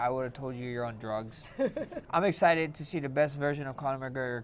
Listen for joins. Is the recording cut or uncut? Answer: cut